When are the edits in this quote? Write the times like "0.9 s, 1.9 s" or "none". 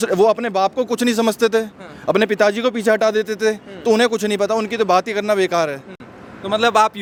none